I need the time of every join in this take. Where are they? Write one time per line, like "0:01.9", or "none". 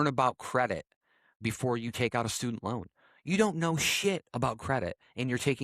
0:01.4